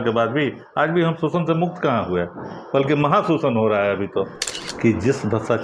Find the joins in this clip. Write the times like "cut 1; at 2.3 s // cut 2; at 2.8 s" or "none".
cut 1; at 4.6 s